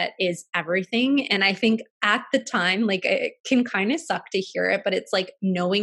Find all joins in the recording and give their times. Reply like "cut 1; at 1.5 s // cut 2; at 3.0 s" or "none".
none